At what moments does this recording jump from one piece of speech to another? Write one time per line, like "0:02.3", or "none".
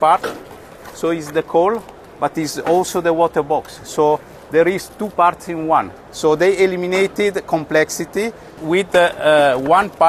none